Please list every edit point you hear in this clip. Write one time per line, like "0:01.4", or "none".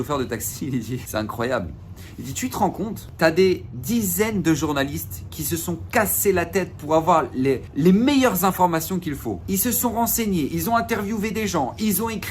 0:01.1
0:03.0
0:07.7
0:09.3